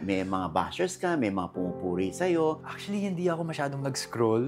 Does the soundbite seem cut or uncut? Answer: cut